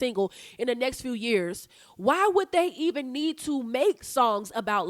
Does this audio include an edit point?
no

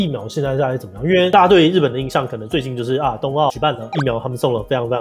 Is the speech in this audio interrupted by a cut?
no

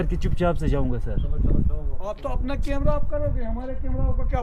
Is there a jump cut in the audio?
no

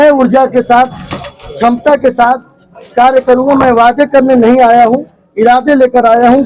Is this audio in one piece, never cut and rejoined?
yes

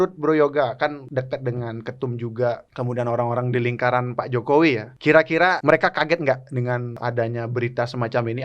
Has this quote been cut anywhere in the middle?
yes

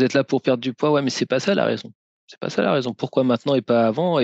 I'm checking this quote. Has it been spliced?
no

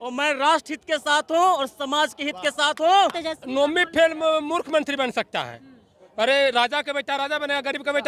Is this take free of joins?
no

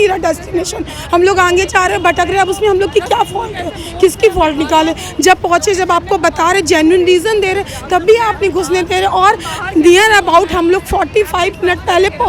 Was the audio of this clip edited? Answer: no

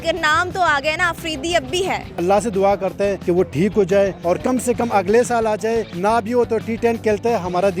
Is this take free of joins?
no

